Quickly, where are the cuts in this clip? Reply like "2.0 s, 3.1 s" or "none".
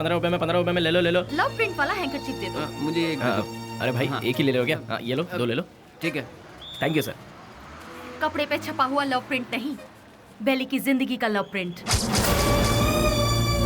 1.3 s

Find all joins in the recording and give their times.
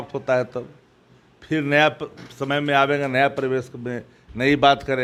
none

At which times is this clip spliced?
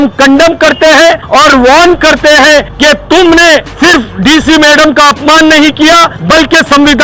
1.2 s, 2.7 s, 3.7 s, 6.1 s

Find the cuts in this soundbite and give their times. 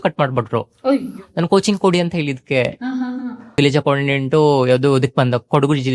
3.6 s

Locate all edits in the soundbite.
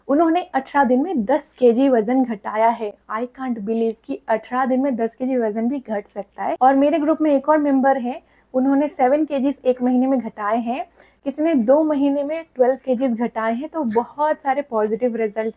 none

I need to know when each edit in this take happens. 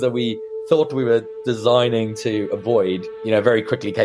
3.1 s

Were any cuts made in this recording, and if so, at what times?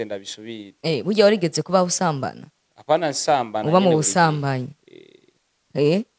none

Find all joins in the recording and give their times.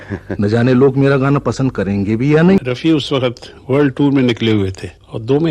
2.6 s

